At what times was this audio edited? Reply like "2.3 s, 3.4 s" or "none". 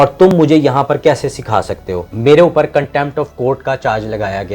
2.1 s

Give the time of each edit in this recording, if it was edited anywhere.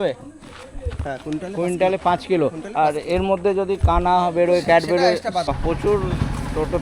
5.5 s

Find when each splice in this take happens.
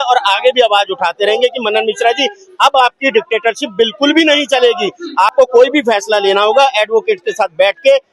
none

